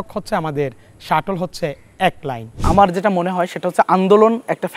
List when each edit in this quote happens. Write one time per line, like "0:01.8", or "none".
0:02.5

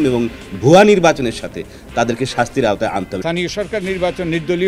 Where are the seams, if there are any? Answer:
0:03.1

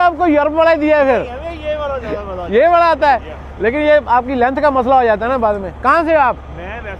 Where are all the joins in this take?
none

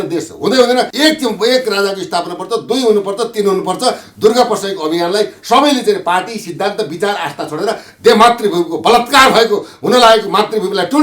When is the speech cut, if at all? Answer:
0:00.9

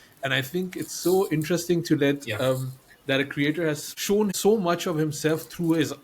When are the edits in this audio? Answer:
0:04.3

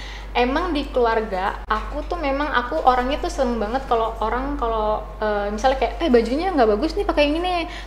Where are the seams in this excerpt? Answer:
none

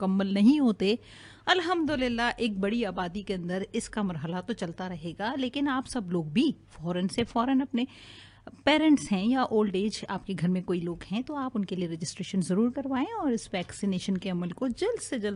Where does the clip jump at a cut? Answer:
none

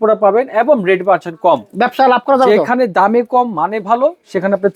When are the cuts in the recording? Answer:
none

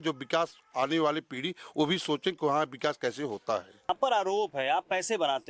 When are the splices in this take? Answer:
0:03.9

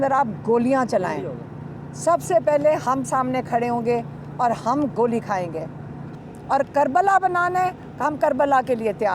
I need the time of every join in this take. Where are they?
0:06.0

